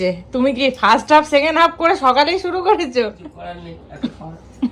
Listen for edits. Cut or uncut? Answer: uncut